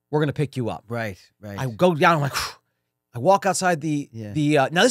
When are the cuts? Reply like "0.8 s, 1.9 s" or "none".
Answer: none